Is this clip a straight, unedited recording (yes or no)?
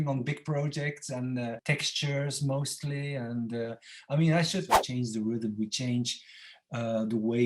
no